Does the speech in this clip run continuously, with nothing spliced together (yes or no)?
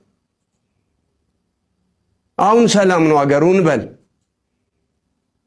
yes